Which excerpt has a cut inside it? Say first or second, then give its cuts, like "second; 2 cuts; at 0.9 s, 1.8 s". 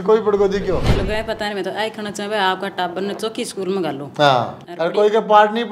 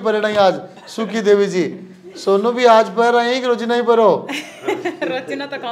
first; 2 cuts; at 0.9 s, 4.6 s